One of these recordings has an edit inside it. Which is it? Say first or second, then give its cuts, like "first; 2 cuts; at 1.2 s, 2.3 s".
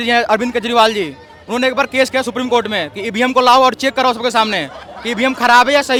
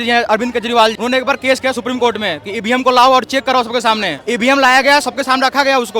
second; 2 cuts; at 0.9 s, 4.2 s